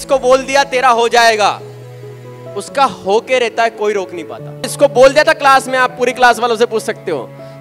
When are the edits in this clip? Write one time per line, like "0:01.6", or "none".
0:04.7